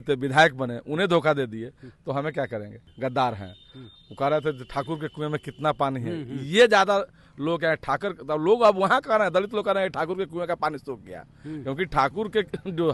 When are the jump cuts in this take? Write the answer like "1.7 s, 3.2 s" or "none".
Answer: none